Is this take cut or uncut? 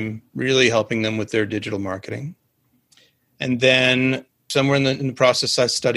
cut